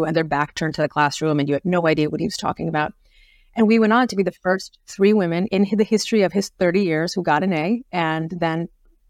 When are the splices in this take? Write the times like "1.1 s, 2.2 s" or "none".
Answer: 5.5 s